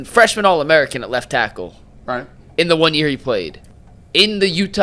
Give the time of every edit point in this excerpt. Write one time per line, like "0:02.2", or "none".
0:03.6